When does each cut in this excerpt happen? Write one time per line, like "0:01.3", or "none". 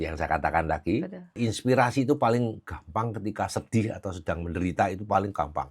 0:01.3

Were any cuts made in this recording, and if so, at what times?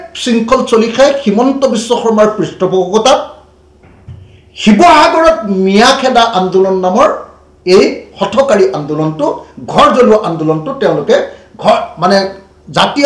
none

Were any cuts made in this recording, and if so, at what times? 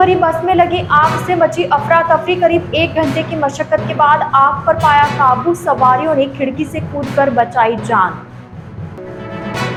none

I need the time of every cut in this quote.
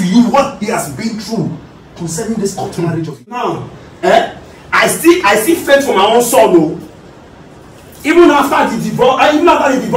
0:03.4

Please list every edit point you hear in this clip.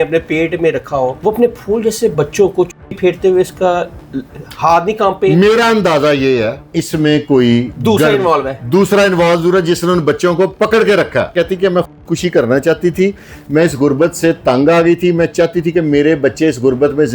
0:01.2
0:02.1
0:06.6
0:07.7
0:11.3

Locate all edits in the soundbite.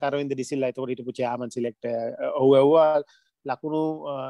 none

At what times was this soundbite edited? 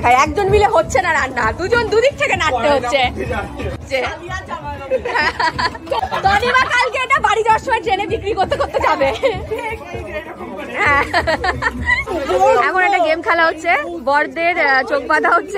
0:03.8
0:06.0
0:12.1

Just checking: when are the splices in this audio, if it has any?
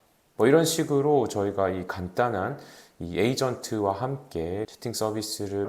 0:04.7

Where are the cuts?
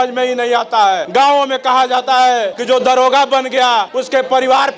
0:01.0
0:02.5
0:03.9

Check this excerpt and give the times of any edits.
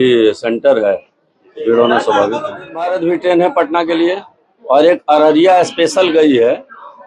0:02.8

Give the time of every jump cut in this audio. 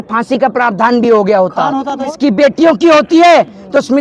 0:02.1

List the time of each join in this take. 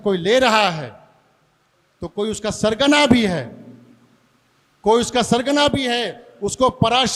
none

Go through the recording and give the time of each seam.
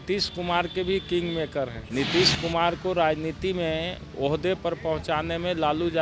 0:01.8

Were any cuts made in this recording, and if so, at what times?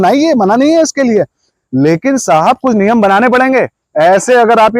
none

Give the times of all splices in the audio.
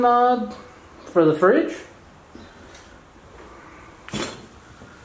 none

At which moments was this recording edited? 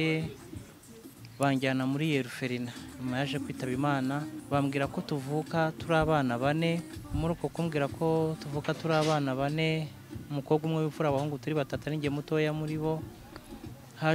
0:04.3
0:07.0

